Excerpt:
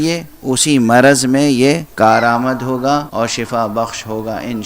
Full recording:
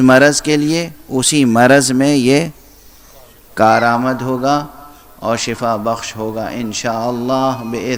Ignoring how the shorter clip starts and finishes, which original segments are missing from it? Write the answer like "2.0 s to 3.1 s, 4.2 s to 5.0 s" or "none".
2.5 s to 3.5 s, 4.7 s to 5.2 s